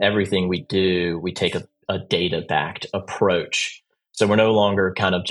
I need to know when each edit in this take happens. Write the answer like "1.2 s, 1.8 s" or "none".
none